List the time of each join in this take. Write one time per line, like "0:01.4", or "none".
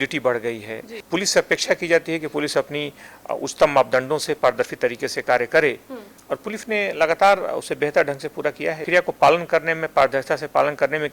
0:00.9
0:08.9